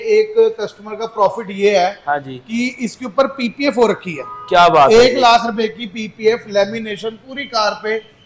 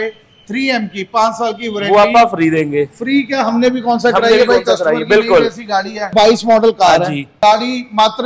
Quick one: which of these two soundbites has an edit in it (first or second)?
second